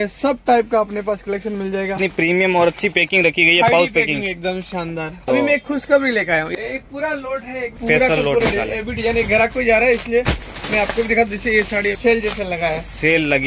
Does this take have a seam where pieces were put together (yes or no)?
yes